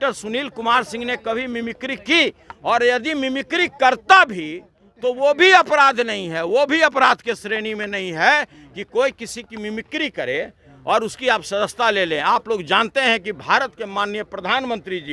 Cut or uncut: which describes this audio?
uncut